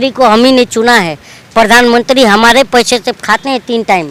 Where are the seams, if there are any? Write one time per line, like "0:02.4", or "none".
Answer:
none